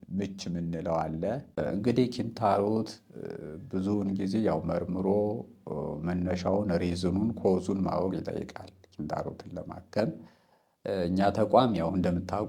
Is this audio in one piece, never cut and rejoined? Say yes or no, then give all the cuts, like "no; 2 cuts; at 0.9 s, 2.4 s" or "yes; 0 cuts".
no; 1 cut; at 1.6 s